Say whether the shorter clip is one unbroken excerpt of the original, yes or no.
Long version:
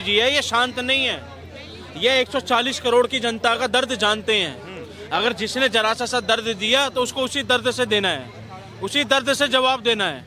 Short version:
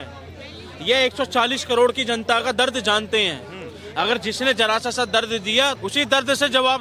no